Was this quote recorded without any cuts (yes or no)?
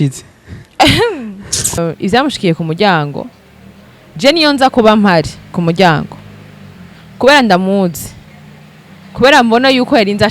no